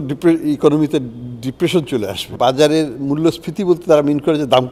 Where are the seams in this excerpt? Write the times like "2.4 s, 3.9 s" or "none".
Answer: 2.3 s